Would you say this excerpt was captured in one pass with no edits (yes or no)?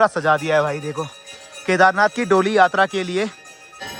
yes